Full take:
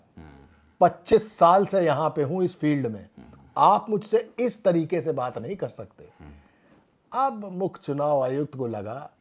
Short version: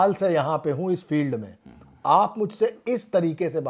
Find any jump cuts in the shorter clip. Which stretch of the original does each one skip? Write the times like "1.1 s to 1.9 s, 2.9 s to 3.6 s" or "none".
none